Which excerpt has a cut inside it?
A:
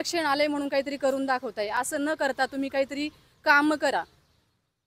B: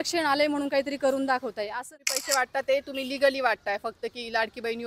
B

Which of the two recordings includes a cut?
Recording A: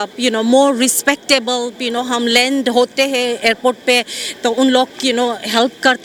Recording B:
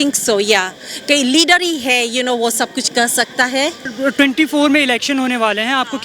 B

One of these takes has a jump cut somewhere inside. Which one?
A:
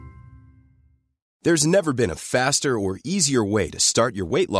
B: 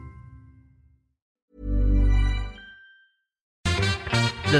B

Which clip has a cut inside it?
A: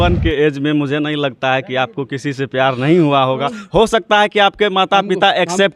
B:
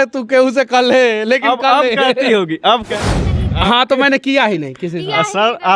B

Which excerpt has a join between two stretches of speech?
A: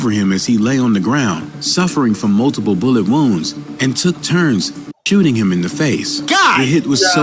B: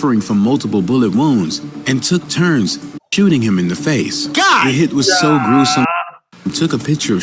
B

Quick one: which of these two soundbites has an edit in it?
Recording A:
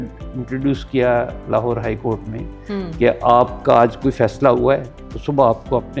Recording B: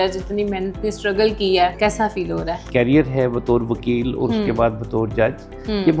B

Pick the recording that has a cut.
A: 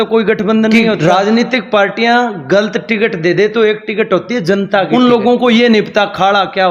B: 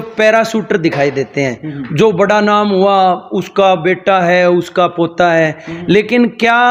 A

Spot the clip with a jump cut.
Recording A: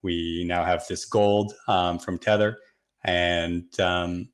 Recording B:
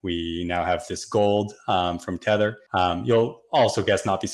B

